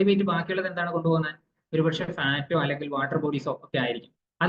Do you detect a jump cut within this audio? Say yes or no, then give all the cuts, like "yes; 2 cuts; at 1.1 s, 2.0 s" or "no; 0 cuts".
no; 0 cuts